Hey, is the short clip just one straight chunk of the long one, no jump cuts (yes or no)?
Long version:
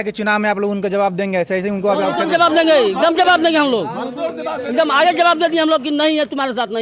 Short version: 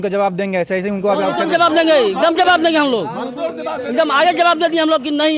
yes